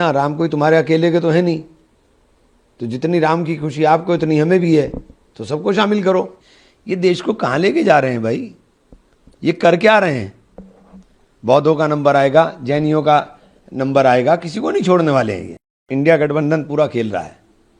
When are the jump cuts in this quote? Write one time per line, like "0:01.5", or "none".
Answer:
0:06.3
0:15.9